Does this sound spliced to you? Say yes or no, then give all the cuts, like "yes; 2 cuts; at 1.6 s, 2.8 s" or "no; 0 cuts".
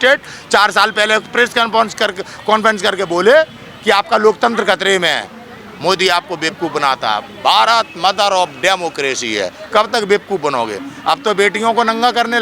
no; 0 cuts